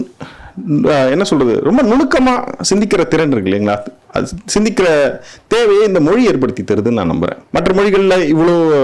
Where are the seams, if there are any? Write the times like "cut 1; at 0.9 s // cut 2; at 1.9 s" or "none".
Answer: cut 1; at 7.4 s